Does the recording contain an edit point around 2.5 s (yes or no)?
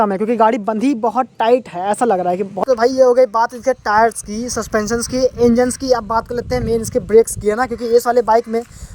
yes